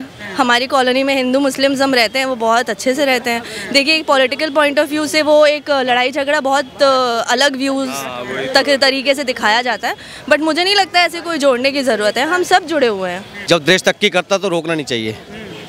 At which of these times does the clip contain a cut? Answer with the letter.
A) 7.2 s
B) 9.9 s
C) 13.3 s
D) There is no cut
C